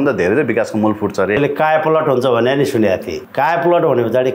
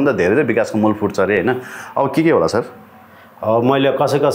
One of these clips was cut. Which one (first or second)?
first